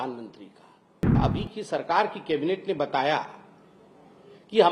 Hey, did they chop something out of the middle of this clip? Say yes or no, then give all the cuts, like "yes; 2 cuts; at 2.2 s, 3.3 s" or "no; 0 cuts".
yes; 1 cut; at 1.2 s